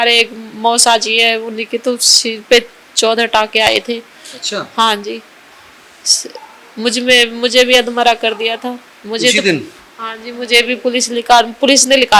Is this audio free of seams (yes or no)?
yes